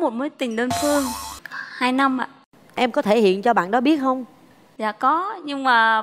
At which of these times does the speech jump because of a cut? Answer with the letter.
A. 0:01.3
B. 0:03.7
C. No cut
A